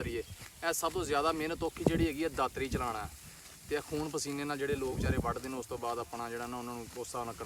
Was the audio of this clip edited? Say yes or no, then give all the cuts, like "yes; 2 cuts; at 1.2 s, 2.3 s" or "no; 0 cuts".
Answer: no; 0 cuts